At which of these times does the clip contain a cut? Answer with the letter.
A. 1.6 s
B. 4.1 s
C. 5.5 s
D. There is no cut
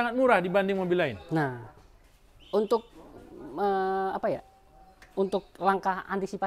D